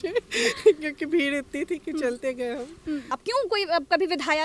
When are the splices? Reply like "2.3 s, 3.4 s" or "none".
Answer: 3.2 s